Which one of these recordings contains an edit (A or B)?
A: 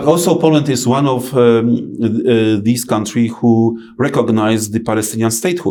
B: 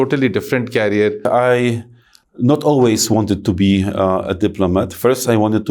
B